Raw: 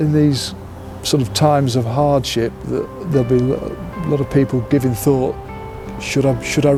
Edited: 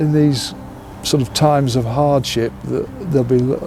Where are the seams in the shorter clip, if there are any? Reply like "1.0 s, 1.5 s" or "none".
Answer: none